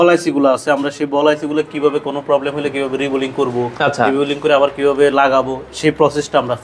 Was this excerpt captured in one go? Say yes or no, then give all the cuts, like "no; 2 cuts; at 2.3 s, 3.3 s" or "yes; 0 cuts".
yes; 0 cuts